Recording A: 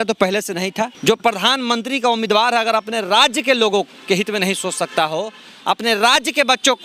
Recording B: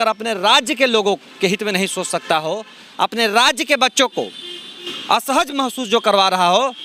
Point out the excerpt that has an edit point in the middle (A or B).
A